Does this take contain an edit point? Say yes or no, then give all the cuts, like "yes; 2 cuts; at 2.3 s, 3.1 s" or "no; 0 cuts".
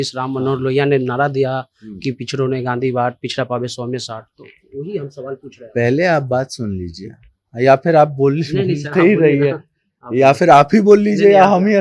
no; 0 cuts